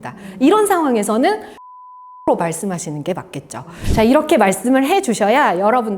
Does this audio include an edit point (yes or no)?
yes